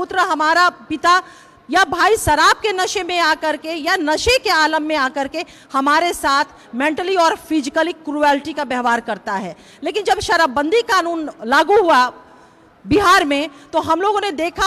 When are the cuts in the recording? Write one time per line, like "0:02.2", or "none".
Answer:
none